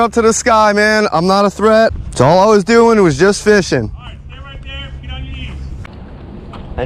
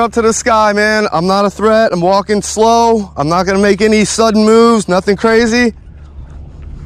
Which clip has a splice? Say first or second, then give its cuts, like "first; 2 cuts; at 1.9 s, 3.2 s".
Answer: first; 2 cuts; at 1.9 s, 5.9 s